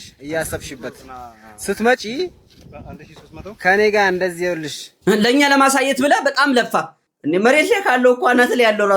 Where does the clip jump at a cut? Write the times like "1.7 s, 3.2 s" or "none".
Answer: 4.9 s, 7.0 s